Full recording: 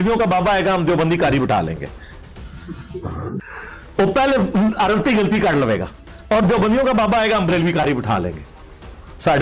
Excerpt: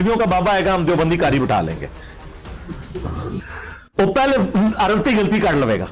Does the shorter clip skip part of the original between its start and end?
no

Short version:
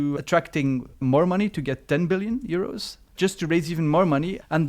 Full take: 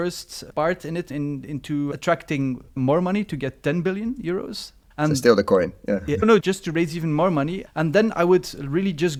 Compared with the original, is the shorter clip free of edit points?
no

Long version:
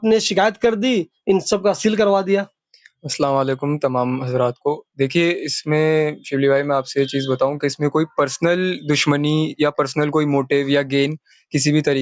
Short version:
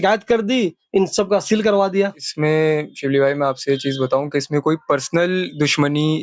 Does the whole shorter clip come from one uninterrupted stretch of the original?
no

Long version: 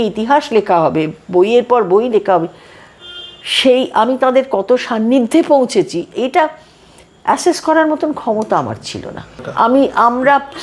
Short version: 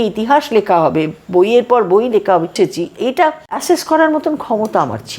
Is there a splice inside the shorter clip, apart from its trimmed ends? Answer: yes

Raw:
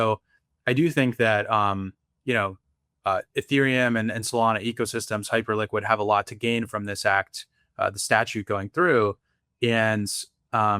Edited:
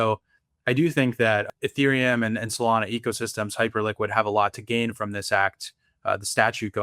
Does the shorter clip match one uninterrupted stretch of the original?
no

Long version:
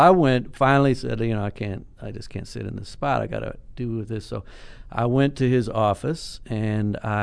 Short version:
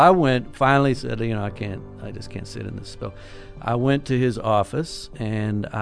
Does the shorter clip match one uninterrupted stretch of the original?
no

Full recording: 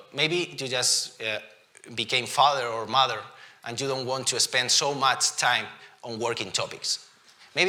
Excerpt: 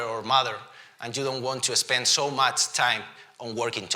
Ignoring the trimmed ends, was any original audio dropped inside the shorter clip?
no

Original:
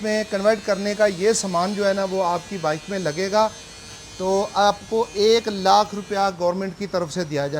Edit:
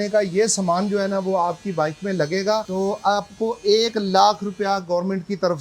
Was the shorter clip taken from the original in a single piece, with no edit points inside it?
no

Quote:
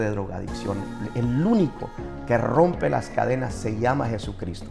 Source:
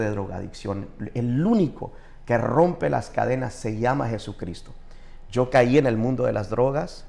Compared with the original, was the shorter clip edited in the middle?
no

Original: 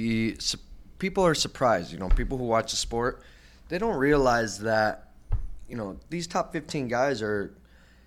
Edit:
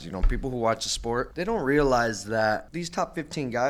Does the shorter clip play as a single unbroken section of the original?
no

